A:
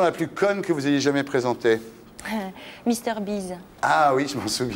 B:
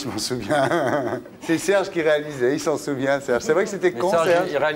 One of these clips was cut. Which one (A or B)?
B